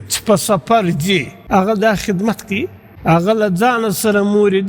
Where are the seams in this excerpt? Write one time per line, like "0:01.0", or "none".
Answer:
0:01.3
0:02.8